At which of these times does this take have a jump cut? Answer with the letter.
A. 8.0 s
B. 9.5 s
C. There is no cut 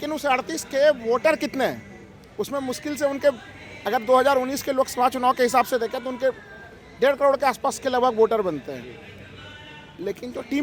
C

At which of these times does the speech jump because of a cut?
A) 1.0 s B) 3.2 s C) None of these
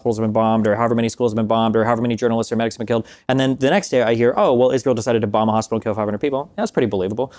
C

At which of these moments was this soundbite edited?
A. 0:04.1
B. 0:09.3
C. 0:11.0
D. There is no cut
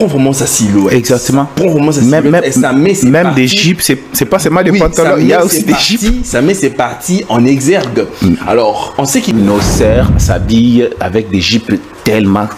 B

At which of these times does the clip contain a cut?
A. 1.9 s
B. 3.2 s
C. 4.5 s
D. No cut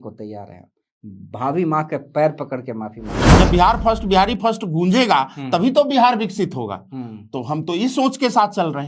B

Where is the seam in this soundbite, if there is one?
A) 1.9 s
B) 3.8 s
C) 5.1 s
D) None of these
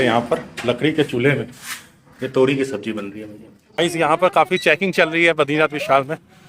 B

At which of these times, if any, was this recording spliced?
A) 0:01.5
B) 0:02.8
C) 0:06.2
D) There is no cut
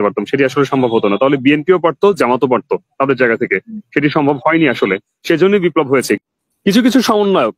C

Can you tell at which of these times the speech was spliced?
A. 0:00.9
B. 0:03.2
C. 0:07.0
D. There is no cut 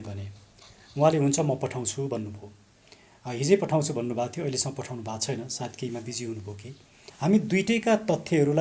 C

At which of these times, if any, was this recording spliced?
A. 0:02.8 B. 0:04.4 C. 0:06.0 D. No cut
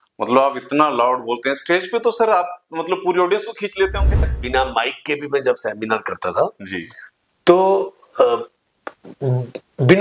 B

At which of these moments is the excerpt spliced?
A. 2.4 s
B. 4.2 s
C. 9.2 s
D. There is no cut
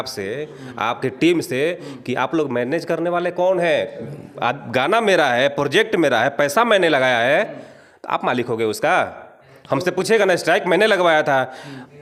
D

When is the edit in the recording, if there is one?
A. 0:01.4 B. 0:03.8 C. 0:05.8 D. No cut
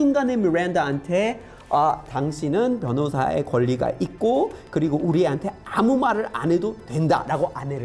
D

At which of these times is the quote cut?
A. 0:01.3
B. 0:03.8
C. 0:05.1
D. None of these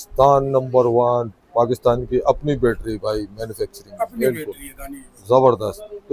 D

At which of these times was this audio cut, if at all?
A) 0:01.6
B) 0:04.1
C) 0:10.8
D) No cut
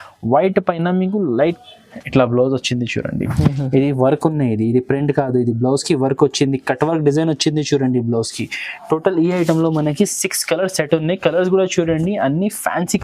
A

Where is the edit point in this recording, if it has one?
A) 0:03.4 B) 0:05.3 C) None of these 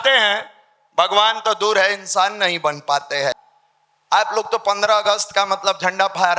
A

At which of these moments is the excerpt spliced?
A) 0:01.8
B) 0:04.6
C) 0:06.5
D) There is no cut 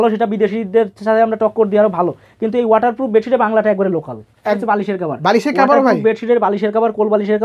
B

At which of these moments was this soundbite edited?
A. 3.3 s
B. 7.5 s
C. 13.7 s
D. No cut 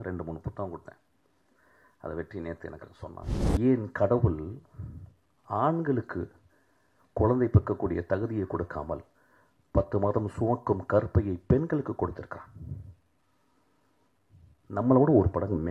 A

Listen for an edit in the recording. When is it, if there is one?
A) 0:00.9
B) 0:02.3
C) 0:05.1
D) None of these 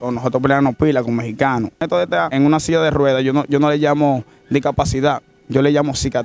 B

